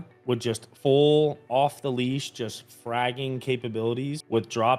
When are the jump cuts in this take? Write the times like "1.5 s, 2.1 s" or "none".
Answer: none